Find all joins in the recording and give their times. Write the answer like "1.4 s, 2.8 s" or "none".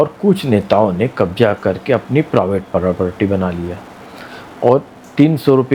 none